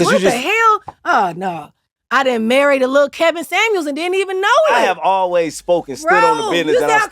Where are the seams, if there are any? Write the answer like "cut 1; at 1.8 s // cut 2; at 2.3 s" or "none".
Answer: cut 1; at 1.9 s // cut 2; at 4.7 s